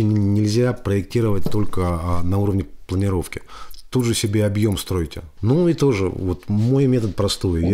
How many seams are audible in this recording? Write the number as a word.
one